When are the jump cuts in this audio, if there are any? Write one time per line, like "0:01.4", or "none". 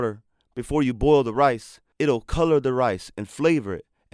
0:02.2